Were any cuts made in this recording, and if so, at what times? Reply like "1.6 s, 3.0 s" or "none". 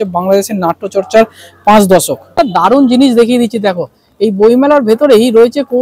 2.2 s